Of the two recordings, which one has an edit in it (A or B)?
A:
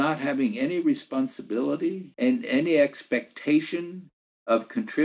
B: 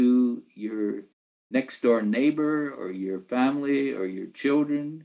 A